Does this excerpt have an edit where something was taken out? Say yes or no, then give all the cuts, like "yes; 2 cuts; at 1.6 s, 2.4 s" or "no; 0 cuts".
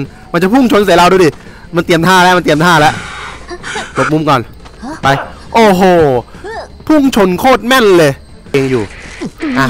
yes; 1 cut; at 8.5 s